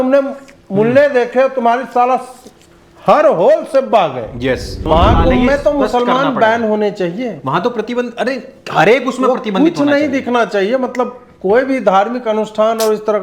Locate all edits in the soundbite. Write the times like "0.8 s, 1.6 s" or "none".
4.8 s